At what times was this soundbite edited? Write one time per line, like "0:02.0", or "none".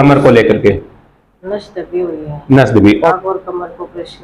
0:03.1